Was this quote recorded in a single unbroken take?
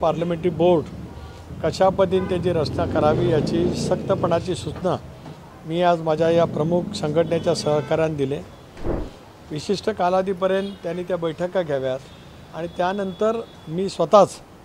no; 1 cut; at 9.0 s

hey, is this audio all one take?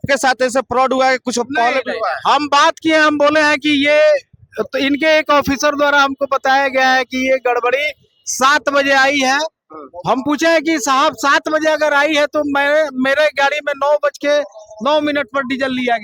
yes; 0 cuts

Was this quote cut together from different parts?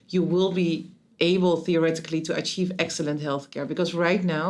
no; 0 cuts

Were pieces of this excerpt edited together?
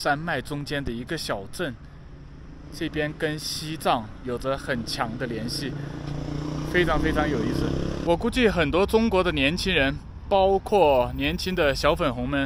yes; 1 cut; at 8.0 s

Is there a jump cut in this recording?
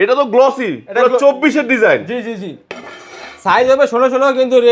no; 0 cuts

